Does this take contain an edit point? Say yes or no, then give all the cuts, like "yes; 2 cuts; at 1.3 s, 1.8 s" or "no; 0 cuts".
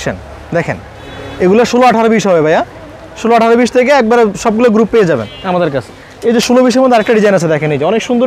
no; 0 cuts